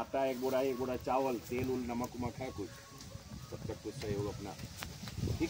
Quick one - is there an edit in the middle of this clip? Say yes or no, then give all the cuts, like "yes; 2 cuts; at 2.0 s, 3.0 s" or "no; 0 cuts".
no; 0 cuts